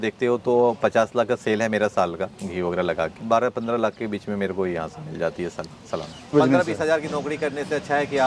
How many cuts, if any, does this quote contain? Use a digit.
2